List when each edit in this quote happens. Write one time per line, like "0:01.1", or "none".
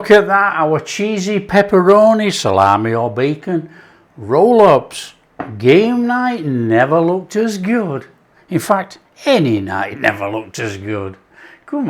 none